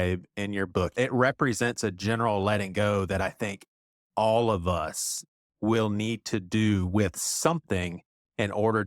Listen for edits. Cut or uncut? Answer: cut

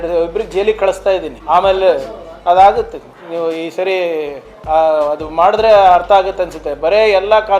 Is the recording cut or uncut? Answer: cut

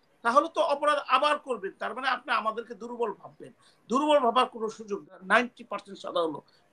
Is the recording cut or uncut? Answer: cut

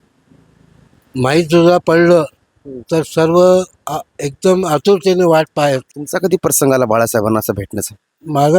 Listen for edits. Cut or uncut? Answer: cut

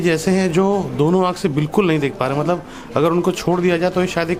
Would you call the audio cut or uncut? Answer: uncut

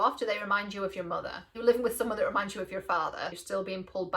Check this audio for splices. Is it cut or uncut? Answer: cut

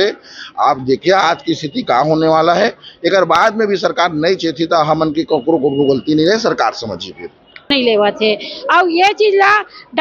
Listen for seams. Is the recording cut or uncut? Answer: cut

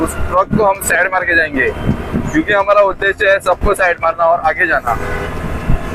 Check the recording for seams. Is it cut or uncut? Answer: uncut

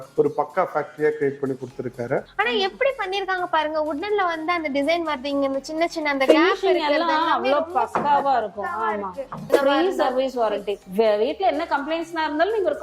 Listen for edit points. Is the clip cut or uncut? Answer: cut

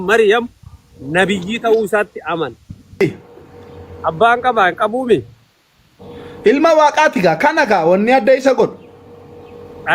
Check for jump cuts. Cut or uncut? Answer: cut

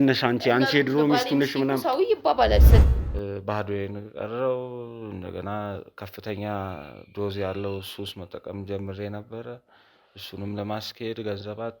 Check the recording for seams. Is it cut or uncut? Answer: cut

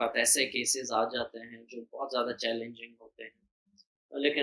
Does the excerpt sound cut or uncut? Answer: uncut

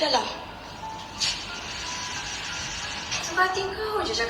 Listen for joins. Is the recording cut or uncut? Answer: uncut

